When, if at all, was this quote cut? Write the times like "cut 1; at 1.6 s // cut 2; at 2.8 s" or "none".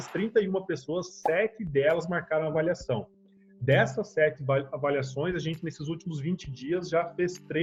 none